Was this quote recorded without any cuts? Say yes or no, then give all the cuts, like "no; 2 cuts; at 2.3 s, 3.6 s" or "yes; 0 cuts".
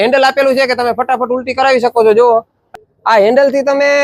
no; 1 cut; at 2.6 s